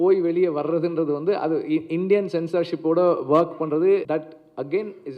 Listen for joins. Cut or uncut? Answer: cut